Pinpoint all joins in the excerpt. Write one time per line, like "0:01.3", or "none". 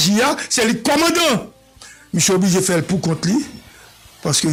none